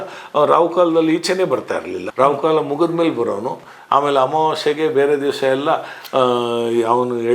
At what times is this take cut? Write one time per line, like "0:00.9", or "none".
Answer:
0:02.1